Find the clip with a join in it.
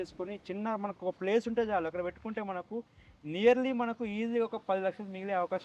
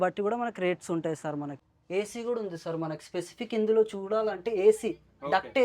second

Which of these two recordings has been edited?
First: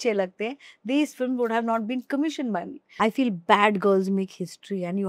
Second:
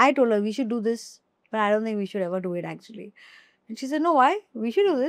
first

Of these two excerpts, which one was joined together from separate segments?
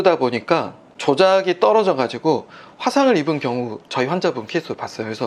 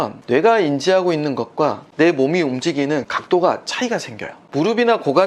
second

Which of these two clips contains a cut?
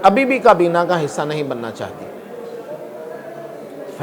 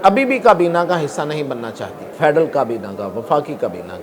second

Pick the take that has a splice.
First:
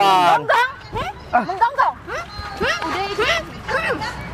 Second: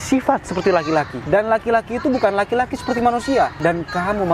second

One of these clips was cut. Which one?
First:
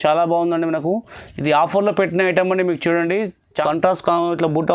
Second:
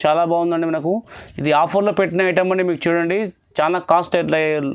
first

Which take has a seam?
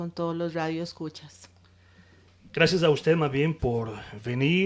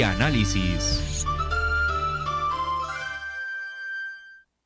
first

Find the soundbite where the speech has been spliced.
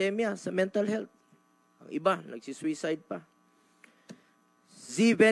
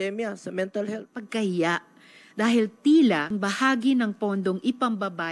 second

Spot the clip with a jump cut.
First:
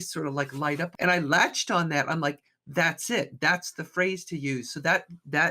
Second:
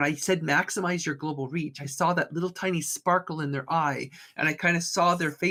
first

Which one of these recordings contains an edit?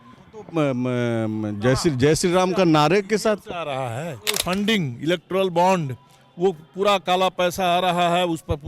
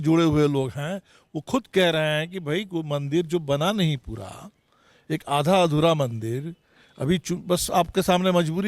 first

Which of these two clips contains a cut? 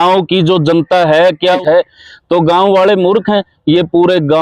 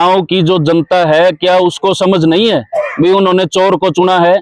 first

